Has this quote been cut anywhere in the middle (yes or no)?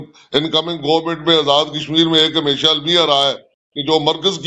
no